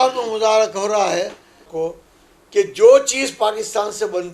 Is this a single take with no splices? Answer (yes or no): no